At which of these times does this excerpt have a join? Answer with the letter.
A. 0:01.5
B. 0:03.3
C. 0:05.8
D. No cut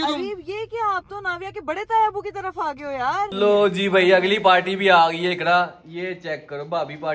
B